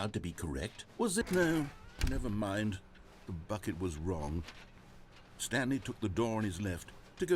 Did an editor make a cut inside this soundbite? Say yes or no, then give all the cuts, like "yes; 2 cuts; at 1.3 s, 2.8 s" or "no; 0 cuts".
yes; 1 cut; at 1.2 s